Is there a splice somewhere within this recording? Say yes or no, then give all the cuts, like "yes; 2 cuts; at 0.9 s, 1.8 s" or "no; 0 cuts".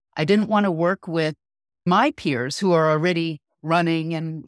yes; 1 cut; at 1.8 s